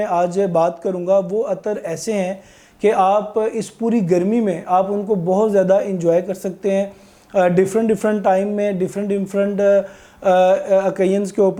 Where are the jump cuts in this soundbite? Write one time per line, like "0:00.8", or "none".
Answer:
none